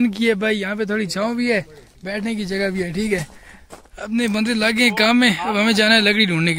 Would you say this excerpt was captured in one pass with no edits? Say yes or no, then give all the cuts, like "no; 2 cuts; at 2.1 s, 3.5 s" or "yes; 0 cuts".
yes; 0 cuts